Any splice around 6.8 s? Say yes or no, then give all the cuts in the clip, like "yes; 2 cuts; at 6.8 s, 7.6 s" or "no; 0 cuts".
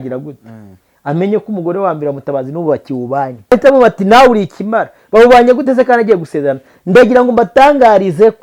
no; 1 cut; at 3.5 s